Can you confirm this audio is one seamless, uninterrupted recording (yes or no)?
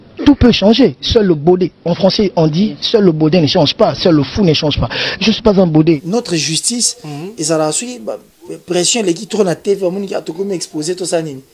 no